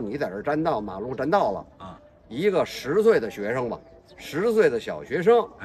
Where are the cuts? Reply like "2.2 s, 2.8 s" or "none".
none